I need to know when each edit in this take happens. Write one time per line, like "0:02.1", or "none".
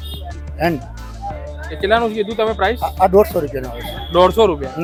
none